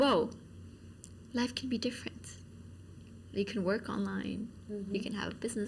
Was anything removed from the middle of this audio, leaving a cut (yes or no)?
no